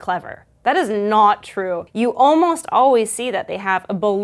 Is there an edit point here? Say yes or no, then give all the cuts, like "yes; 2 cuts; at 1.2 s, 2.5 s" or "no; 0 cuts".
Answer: yes; 1 cut; at 1.8 s